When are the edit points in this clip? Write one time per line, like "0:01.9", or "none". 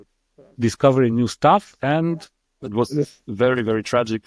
0:02.6